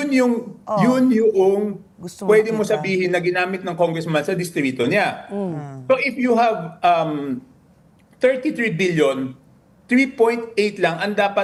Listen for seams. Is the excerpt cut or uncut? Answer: uncut